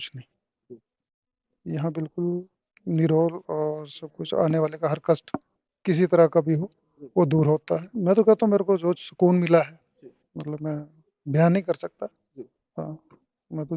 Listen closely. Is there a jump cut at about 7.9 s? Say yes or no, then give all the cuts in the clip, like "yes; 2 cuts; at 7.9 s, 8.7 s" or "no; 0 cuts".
yes; 1 cut; at 7.9 s